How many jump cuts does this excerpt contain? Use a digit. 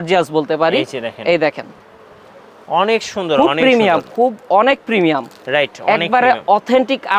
0